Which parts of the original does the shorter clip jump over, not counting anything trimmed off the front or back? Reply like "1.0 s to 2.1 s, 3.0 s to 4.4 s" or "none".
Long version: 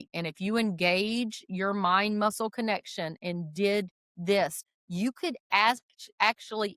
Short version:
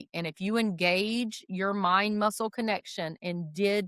none